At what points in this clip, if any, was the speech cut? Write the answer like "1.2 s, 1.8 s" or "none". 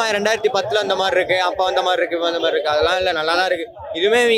none